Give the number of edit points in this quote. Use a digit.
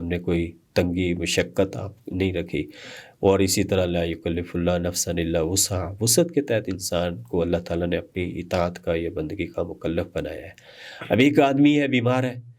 0